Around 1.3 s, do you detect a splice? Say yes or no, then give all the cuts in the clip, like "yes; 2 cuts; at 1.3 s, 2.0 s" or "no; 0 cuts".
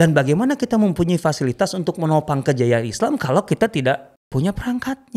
no; 1 cut; at 4.1 s